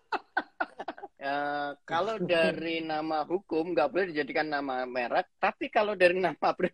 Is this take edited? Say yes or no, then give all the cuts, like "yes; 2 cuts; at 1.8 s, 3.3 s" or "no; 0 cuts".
yes; 1 cut; at 1.1 s